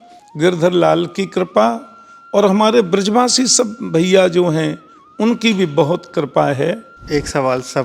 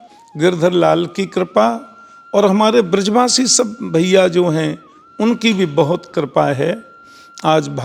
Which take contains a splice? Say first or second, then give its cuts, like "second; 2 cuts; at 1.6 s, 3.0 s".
first; 1 cut; at 6.9 s